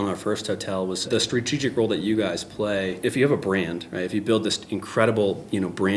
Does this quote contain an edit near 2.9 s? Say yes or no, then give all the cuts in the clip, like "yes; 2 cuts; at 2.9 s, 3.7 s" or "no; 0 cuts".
yes; 2 cuts; at 1.1 s, 2.9 s